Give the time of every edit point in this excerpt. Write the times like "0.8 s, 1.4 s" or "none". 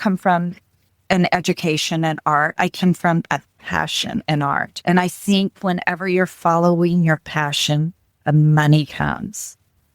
4.7 s